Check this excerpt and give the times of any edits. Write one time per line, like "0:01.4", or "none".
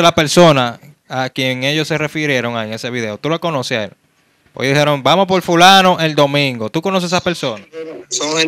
none